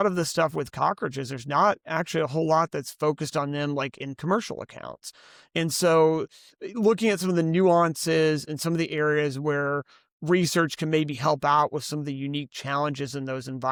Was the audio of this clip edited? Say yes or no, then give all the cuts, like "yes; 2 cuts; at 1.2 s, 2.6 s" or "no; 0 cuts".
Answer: no; 0 cuts